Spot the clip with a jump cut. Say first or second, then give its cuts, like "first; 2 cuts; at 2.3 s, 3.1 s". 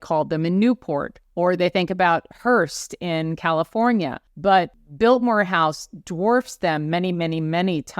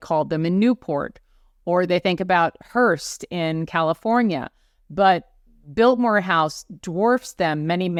first; 2 cuts; at 1.2 s, 4.5 s